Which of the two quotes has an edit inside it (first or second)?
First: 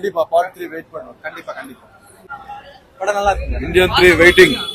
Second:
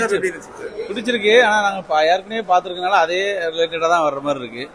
first